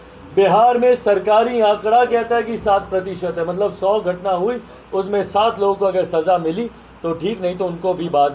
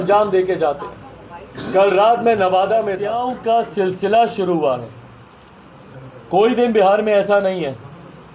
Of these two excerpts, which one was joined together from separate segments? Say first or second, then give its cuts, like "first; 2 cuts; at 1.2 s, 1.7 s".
second; 1 cut; at 3.3 s